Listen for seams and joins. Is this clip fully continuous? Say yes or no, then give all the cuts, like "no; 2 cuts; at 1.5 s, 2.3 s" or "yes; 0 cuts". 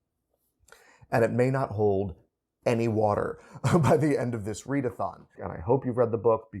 no; 1 cut; at 5.4 s